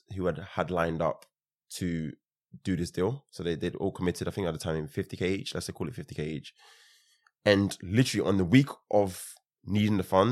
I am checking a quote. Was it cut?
no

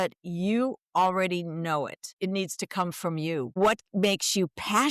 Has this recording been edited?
yes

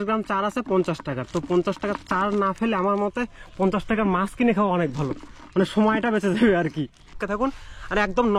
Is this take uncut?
no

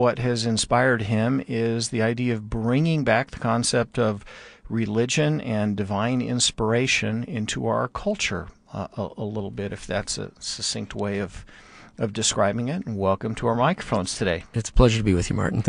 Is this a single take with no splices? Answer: no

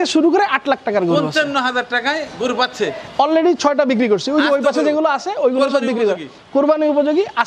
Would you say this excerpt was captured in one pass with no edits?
yes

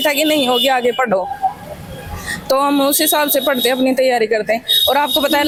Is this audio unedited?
yes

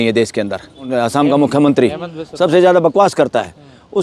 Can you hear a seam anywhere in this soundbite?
yes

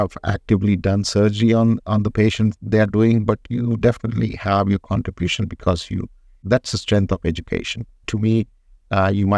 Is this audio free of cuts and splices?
yes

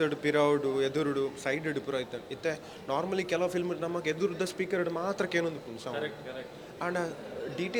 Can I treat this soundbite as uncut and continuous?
yes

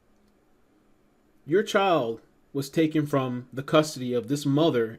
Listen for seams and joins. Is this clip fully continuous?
yes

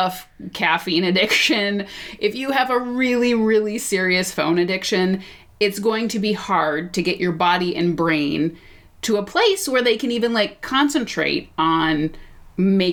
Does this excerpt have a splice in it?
no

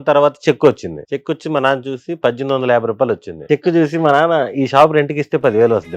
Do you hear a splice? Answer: yes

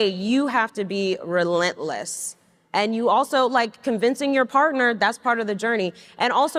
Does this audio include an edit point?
no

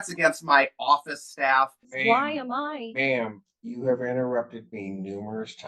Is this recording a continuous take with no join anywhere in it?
no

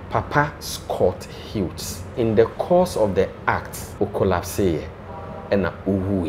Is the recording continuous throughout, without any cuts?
no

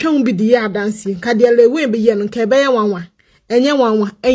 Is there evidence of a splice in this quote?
no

